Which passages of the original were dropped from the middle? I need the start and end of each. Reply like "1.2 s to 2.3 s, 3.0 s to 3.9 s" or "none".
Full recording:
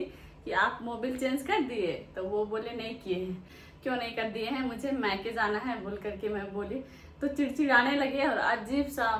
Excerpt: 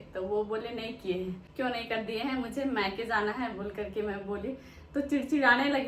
3.4 s to 3.7 s